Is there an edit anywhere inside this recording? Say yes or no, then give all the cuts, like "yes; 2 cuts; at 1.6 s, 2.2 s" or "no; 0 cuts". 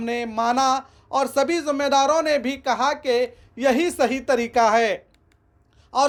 no; 0 cuts